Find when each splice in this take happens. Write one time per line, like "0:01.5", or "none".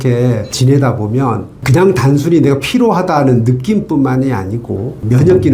none

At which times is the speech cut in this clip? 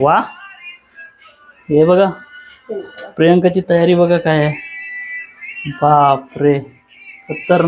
none

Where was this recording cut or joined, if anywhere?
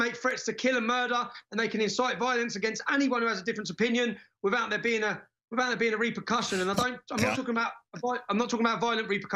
none

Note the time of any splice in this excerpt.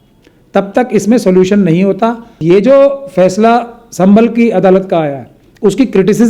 0:02.3

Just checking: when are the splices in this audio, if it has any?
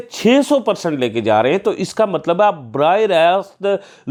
none

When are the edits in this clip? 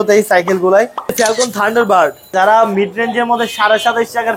0:01.1
0:02.3

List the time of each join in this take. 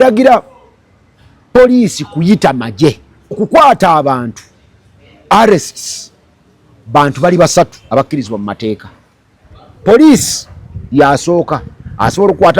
0:03.4

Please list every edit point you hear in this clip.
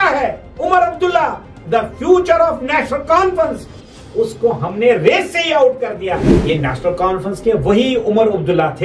0:06.3

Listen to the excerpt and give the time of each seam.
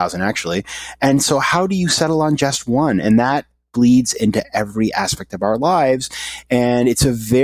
none

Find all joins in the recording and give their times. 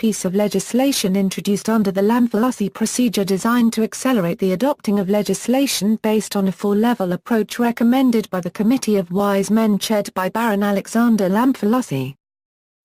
0:09.1

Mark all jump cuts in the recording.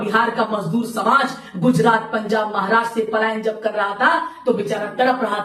none

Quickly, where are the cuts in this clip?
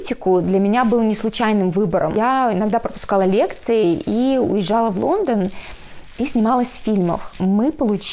0:02.1
0:07.3

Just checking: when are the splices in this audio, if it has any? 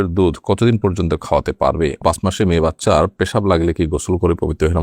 0:02.0

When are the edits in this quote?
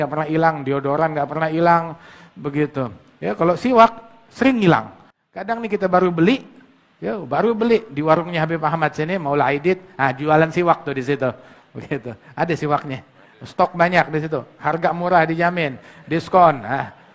none

